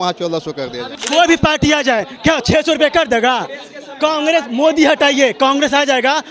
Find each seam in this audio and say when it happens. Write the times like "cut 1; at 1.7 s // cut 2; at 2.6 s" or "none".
cut 1; at 0.9 s